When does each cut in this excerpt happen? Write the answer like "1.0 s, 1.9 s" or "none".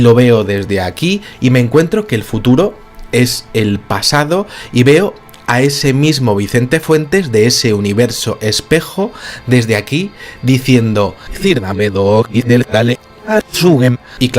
4.0 s